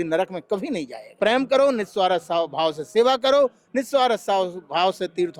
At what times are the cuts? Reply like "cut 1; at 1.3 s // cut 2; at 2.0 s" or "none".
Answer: cut 1; at 1.0 s